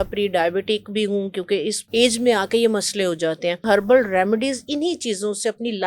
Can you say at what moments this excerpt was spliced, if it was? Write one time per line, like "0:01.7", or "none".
0:03.6